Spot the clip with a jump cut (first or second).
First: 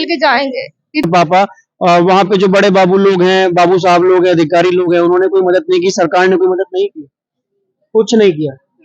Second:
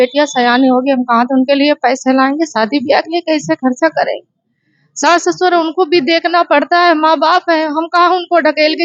first